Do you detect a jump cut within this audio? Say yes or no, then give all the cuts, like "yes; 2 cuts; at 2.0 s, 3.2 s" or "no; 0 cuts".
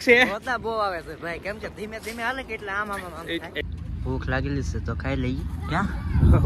yes; 1 cut; at 3.6 s